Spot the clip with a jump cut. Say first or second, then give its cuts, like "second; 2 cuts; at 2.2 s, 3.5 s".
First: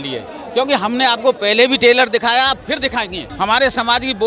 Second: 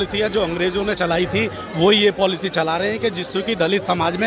first; 1 cut; at 3.2 s